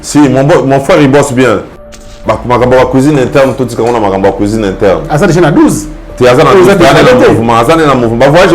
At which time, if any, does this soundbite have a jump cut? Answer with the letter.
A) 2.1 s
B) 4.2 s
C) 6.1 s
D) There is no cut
A